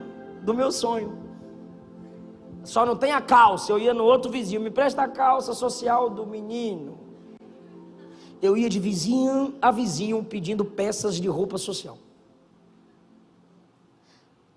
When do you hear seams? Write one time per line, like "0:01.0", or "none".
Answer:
none